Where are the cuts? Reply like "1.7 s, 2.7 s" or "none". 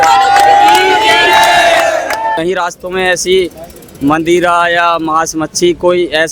2.3 s

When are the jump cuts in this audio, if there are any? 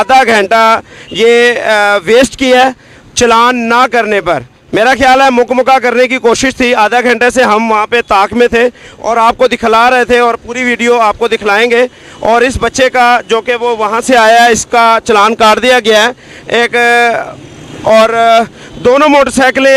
none

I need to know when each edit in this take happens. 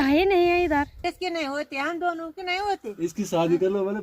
1.0 s

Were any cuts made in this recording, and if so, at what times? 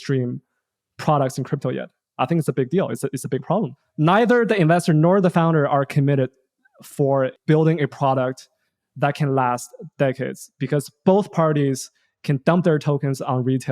7.4 s

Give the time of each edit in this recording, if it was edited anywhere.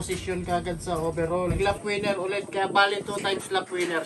1.5 s

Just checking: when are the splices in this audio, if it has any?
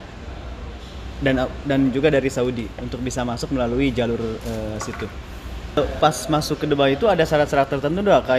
5.8 s

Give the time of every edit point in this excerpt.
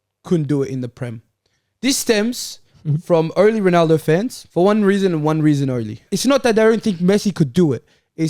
4.4 s, 6.1 s

